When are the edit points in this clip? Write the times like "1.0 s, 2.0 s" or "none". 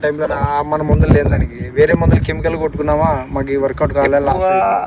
none